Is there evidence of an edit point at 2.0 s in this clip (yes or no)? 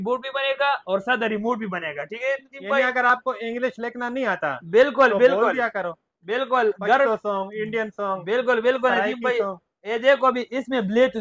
no